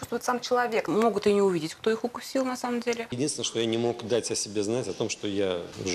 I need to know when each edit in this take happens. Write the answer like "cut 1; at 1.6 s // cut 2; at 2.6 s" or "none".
cut 1; at 0.9 s // cut 2; at 3.1 s